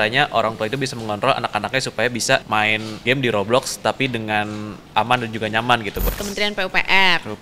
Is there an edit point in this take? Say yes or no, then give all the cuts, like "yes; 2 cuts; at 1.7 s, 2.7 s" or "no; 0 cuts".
yes; 3 cuts; at 3.0 s, 4.9 s, 6.1 s